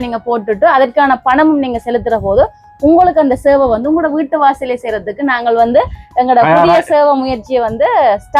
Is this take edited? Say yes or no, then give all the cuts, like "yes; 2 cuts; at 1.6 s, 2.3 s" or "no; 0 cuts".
no; 0 cuts